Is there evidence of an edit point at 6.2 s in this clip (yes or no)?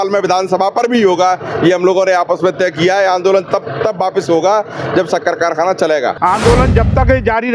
yes